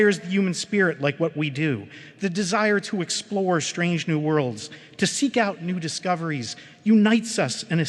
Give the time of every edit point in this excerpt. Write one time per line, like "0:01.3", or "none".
none